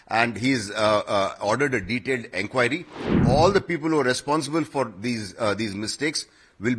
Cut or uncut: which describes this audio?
cut